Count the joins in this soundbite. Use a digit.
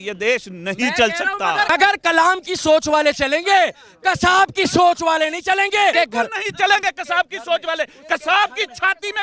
2